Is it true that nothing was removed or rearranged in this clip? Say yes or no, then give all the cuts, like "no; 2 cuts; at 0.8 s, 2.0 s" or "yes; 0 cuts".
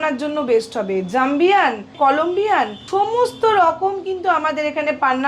no; 2 cuts; at 1.9 s, 2.8 s